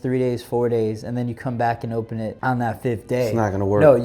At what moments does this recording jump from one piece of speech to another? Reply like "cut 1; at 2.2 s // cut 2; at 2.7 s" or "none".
cut 1; at 2.4 s